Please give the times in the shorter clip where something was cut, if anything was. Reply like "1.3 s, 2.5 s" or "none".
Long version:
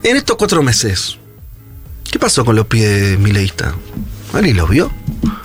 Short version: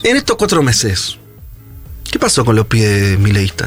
none

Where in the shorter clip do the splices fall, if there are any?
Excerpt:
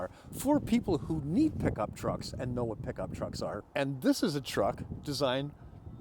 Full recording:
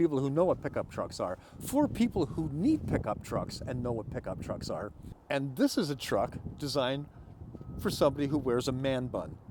3.6 s

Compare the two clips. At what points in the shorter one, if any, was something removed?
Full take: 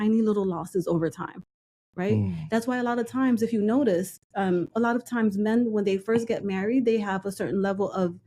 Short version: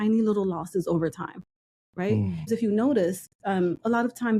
2.5 s

